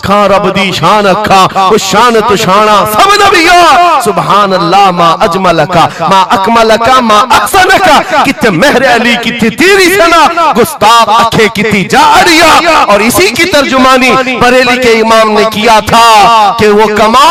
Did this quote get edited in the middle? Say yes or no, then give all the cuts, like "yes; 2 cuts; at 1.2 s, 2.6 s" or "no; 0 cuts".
no; 0 cuts